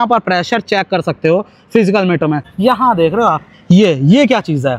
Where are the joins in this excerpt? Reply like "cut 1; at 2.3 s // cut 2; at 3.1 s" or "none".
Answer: cut 1; at 2.4 s